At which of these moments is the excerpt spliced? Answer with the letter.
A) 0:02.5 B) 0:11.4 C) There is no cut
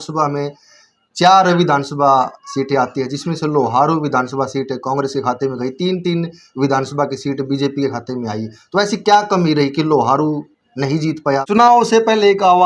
B